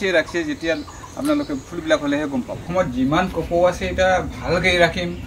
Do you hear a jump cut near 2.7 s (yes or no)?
yes